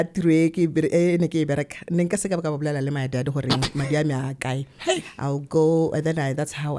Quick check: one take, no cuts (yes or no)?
yes